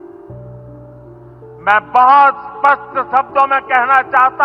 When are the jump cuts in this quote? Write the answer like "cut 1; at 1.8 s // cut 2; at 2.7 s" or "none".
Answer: none